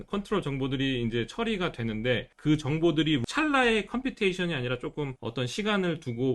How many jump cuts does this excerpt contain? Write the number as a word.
three